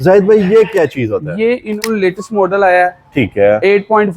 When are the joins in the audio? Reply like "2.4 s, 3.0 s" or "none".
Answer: 1.8 s